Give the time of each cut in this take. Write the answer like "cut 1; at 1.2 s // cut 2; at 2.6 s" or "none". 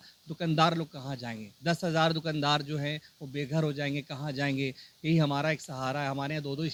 none